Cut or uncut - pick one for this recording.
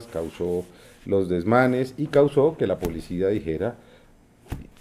uncut